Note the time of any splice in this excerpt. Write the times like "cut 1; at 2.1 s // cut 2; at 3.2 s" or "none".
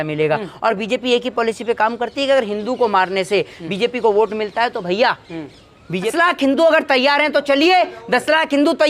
cut 1; at 6.0 s

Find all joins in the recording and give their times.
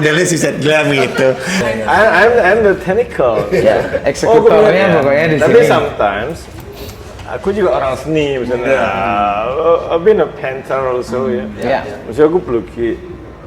cut 1; at 1.6 s

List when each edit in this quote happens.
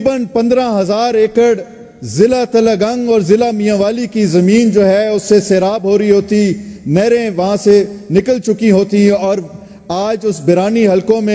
none

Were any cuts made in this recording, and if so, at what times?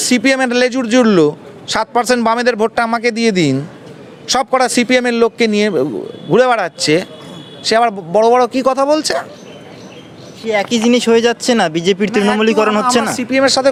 none

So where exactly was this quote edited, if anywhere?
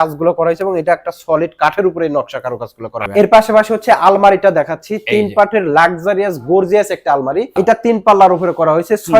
cut 1; at 3.0 s // cut 2; at 7.5 s

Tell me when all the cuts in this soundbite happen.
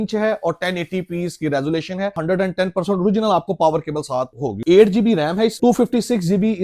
cut 1; at 2.2 s // cut 2; at 4.6 s // cut 3; at 5.6 s

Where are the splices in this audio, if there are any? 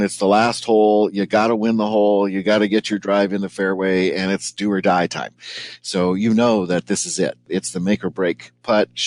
cut 1; at 7.5 s

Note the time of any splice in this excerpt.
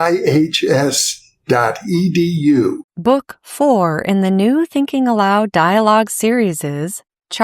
cut 1; at 2.8 s

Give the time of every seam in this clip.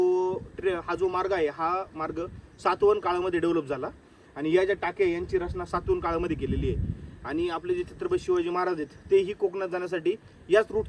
none

